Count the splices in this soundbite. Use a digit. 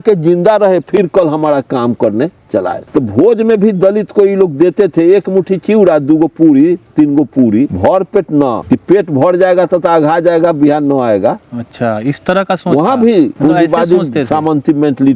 4